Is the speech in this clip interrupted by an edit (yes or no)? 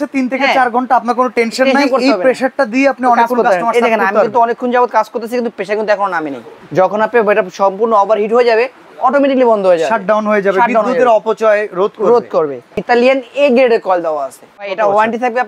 yes